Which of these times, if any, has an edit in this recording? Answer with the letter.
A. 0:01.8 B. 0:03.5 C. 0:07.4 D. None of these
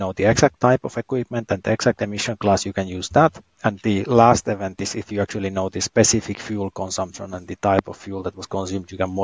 B